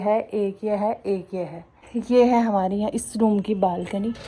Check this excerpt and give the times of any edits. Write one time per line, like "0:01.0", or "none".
0:01.8